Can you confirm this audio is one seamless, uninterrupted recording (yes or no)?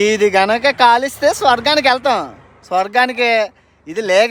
yes